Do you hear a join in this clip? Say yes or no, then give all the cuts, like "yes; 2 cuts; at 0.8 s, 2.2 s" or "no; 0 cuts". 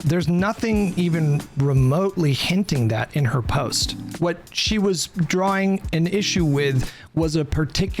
yes; 1 cut; at 4.0 s